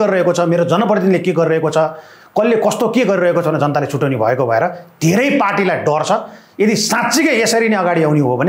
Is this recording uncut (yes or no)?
yes